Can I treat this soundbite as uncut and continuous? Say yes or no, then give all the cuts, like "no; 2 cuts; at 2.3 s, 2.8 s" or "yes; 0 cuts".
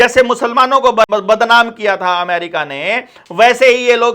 no; 1 cut; at 1.1 s